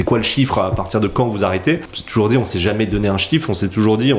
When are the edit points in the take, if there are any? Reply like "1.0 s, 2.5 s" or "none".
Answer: 2.0 s